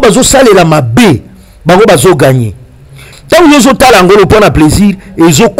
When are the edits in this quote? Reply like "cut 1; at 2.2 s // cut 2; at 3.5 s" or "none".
cut 1; at 3.0 s